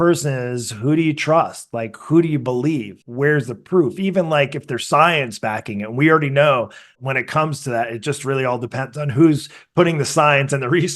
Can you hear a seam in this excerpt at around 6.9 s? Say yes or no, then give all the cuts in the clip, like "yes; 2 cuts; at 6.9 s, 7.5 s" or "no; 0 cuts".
yes; 2 cuts; at 3.0 s, 6.9 s